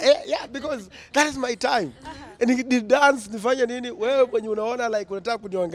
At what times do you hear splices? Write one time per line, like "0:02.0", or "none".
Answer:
none